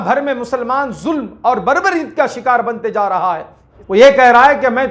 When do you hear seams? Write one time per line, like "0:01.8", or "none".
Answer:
0:03.7